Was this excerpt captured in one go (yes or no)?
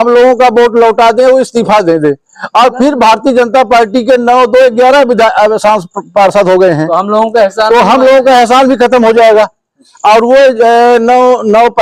yes